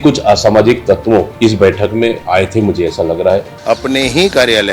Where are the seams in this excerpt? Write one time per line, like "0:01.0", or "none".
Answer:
0:01.3
0:02.2
0:03.5